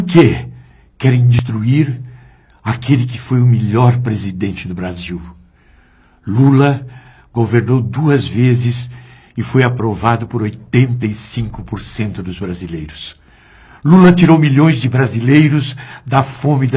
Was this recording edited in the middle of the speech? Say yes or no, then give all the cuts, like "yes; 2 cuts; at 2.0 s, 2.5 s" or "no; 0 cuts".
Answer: yes; 1 cut; at 1.4 s